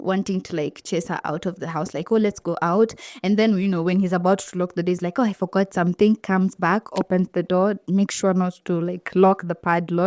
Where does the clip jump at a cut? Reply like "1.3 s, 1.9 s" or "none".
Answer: none